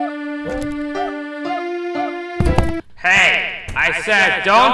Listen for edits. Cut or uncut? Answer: uncut